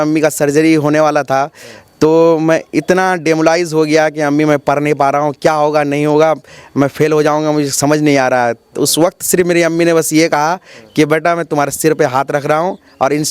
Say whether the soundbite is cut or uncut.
uncut